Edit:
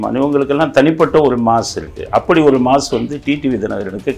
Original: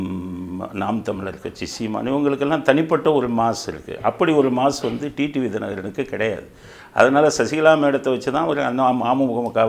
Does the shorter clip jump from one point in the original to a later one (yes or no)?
no